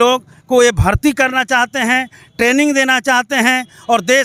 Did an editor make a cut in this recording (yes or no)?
no